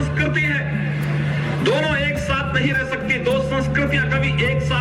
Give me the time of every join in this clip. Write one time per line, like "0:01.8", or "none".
none